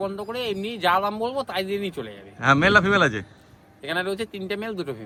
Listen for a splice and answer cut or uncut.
uncut